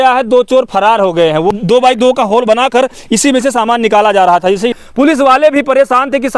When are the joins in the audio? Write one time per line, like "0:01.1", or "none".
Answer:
0:01.5
0:04.8